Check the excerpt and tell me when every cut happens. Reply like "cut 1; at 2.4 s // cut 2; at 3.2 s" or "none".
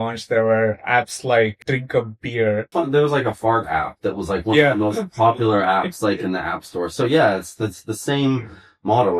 cut 1; at 1.6 s // cut 2; at 2.7 s